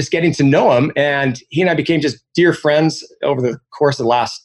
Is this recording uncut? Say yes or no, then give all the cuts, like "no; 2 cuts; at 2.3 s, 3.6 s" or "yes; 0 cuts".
yes; 0 cuts